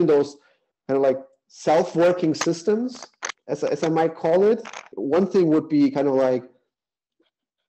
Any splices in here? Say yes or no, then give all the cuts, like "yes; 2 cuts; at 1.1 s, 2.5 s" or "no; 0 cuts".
yes; 1 cut; at 4.9 s